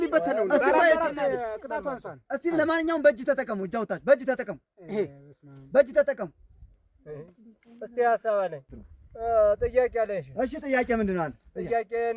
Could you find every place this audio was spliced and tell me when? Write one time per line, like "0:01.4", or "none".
none